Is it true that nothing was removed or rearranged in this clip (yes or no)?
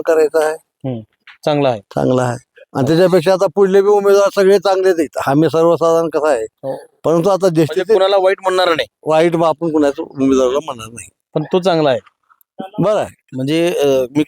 no